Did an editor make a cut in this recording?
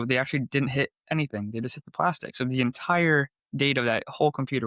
no; 0 cuts

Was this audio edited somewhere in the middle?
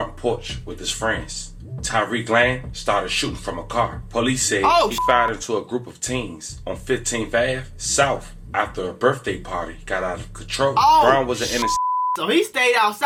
no; 0 cuts

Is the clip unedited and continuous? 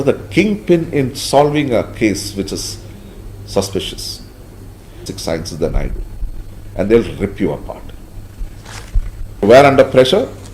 no; 2 cuts; at 5.1 s, 9.4 s

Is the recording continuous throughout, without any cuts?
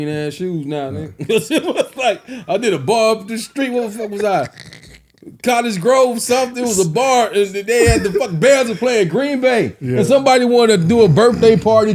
yes; 0 cuts

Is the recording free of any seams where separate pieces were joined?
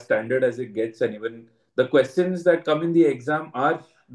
yes; 0 cuts

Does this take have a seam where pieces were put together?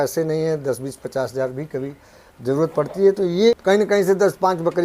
yes; 1 cut; at 3.5 s

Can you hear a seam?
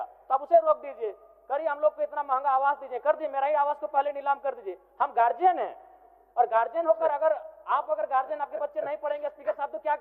no; 0 cuts

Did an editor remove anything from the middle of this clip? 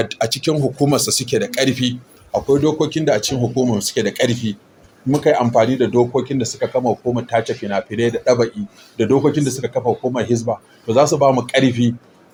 no; 0 cuts

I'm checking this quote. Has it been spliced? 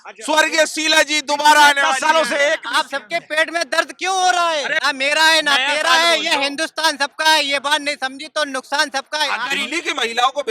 yes; 3 cuts; at 2.7 s, 4.8 s, 9.5 s

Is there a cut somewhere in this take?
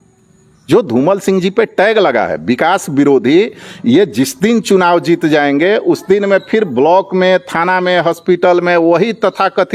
no; 0 cuts

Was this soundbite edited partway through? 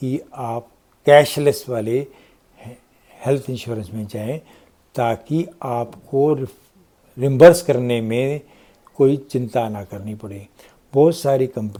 no; 0 cuts

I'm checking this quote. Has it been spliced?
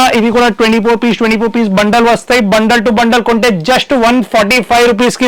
no; 0 cuts

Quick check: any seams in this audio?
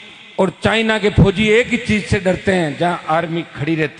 no; 0 cuts

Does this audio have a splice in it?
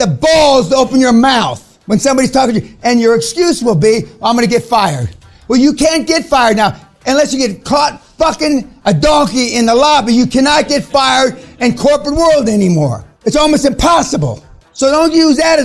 no; 0 cuts

